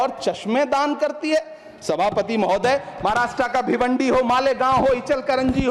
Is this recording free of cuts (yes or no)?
yes